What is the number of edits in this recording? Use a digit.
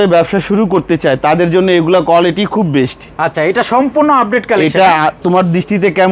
0